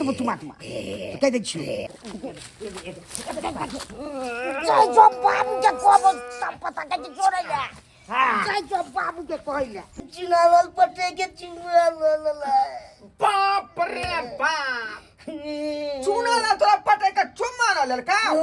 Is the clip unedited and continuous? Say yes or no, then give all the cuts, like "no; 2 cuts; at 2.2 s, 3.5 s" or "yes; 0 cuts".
no; 2 cuts; at 2.0 s, 9.9 s